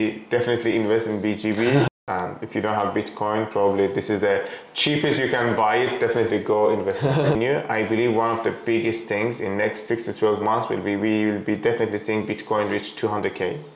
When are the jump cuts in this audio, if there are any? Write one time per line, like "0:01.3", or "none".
0:01.9
0:07.3